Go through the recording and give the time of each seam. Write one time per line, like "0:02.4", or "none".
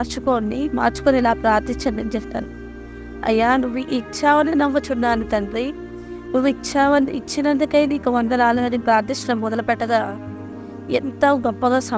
none

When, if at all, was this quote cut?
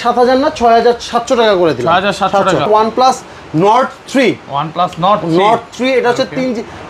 0:02.7

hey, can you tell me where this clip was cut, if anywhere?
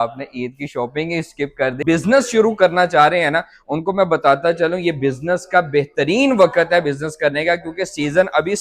0:01.8

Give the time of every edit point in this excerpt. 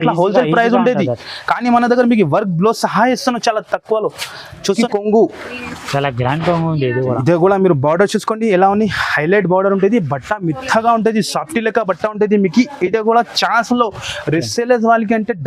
0:04.8

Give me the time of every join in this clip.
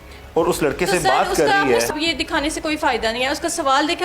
0:01.9

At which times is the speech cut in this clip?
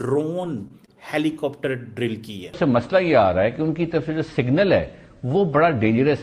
0:02.6

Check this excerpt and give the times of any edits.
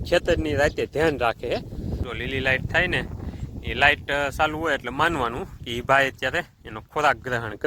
0:02.0

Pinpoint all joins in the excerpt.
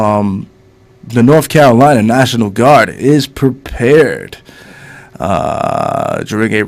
none

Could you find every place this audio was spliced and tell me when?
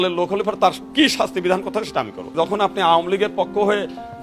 0:02.2

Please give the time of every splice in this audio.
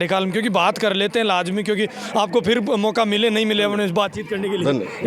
none

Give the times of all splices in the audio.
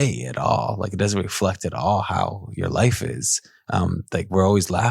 0:04.0

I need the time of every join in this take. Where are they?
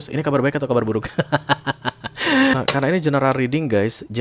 0:02.5

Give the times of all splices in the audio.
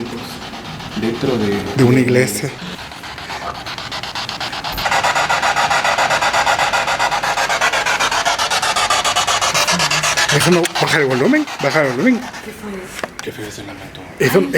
0:02.7
0:04.9

